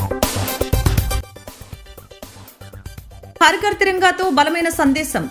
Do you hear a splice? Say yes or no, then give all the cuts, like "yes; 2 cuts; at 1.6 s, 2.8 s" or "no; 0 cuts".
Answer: yes; 1 cut; at 3.4 s